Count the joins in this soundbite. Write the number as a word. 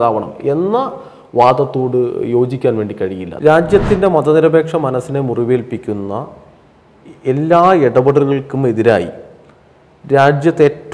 one